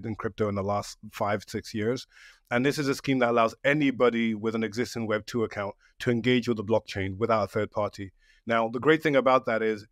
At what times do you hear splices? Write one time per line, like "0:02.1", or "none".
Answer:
none